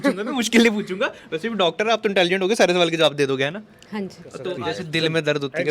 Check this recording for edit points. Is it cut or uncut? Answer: cut